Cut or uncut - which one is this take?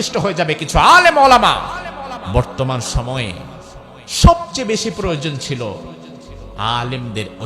cut